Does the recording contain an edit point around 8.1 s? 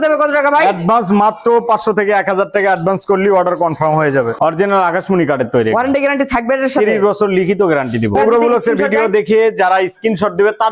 yes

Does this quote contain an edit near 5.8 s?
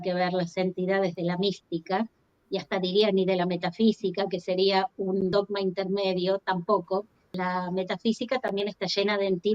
no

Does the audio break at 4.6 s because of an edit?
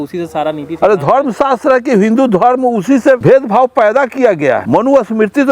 yes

